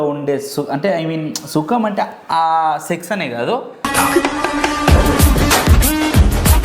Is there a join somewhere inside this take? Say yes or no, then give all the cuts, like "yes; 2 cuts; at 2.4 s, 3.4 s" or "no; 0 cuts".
no; 0 cuts